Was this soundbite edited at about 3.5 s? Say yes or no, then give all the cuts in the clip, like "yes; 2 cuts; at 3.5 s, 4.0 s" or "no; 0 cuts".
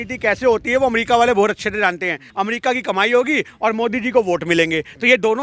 no; 1 cut; at 2.2 s